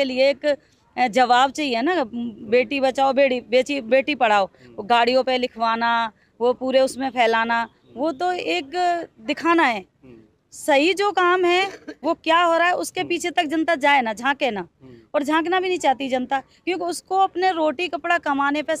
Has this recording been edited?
no; 0 cuts

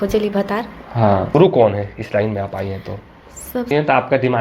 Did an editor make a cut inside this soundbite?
yes; 2 cuts; at 1.3 s, 3.7 s

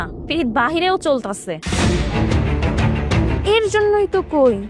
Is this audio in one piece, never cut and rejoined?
no; 2 cuts; at 1.5 s, 3.4 s

